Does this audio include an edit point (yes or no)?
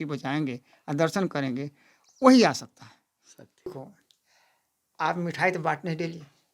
yes